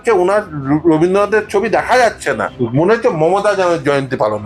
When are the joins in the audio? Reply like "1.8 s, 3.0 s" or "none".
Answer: 2.5 s

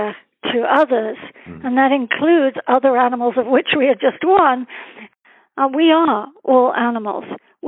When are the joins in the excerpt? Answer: 5.0 s

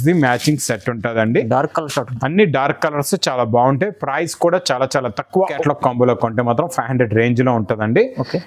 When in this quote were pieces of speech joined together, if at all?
5.6 s

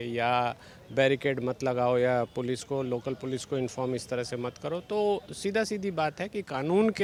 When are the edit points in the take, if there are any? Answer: none

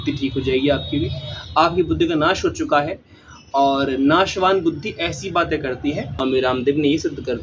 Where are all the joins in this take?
6.2 s

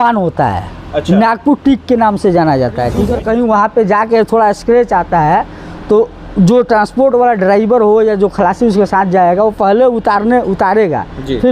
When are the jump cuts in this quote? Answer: 3.0 s

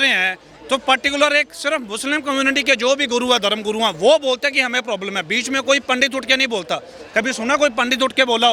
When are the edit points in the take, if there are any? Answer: none

